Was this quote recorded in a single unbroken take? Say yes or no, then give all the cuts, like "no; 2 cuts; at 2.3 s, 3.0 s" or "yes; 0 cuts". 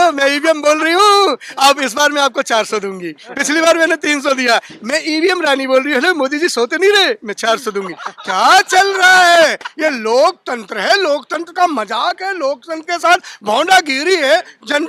yes; 0 cuts